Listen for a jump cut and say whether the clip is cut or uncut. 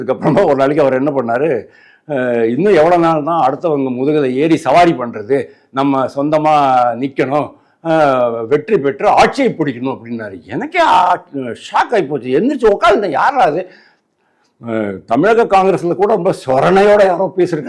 uncut